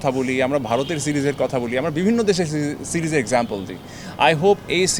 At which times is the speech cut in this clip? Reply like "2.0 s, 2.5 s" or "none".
none